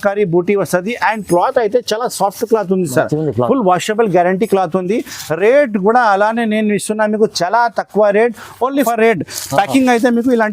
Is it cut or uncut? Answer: cut